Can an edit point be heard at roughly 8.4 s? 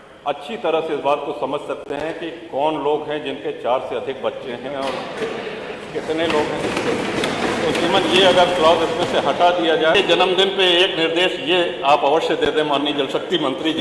no; 1 cut; at 9.9 s

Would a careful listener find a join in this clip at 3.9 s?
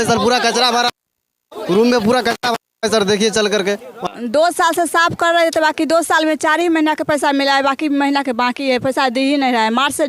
yes; 1 cut; at 3.9 s

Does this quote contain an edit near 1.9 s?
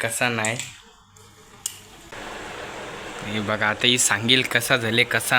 yes; 1 cut; at 1.9 s

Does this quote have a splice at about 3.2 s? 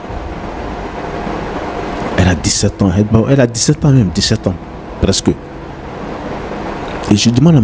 no; 0 cuts

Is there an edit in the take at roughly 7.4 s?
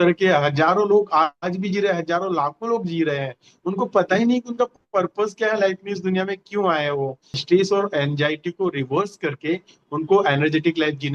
yes; 1 cut; at 7.4 s

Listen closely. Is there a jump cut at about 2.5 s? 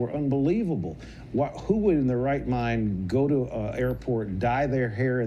no; 0 cuts

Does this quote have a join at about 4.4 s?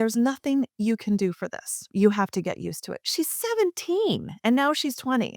no; 1 cut; at 1.8 s

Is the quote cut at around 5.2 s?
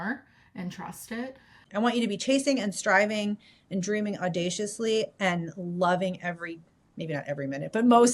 no; 1 cut; at 1.5 s

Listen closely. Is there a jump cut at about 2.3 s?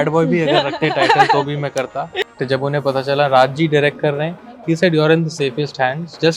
yes; 1 cut; at 2.3 s

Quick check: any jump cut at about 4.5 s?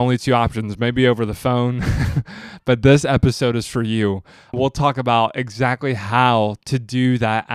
yes; 1 cut; at 4.5 s

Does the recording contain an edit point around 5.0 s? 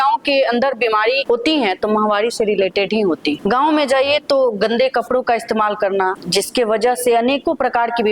no; 3 cuts; at 1.2 s, 3.4 s, 6.2 s

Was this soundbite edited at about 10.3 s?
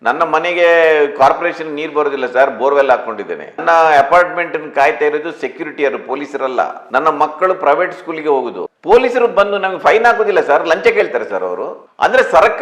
no; 1 cut; at 8.6 s

